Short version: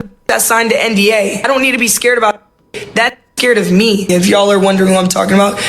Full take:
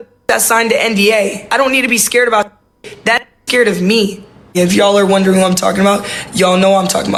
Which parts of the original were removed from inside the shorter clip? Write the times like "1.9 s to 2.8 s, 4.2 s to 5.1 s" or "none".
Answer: 1.4 s to 1.5 s, 4.1 s to 4.5 s